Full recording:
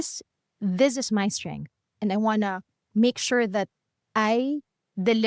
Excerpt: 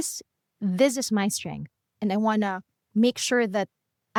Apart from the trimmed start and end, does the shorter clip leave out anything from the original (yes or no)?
no